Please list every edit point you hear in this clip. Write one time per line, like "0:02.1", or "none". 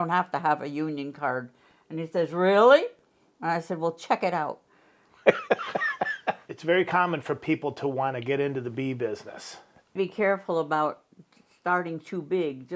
0:06.5
0:09.9